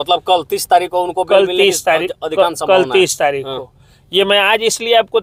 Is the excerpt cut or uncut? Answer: uncut